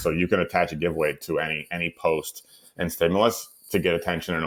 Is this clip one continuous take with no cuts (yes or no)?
yes